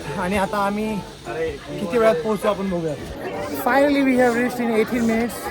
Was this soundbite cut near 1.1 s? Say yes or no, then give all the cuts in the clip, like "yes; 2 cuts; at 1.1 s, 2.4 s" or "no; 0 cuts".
no; 1 cut; at 3.1 s